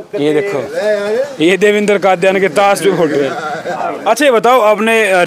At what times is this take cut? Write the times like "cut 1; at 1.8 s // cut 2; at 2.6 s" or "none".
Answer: cut 1; at 3.8 s